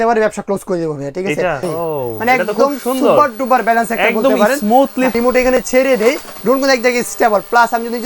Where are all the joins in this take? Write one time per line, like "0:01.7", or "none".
0:01.6
0:05.1